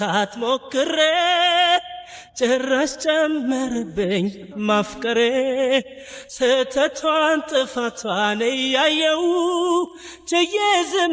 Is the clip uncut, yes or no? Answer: yes